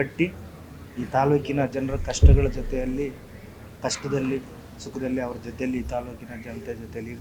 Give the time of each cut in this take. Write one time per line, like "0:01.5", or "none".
none